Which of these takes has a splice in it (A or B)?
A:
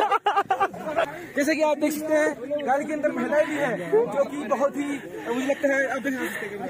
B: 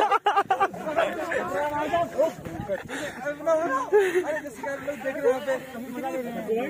A